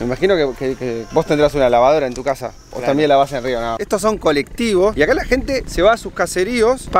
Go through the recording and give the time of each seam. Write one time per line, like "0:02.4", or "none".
0:03.8
0:04.9